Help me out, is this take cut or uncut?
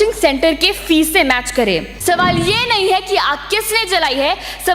cut